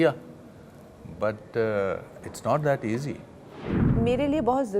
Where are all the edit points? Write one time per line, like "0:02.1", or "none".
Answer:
0:03.8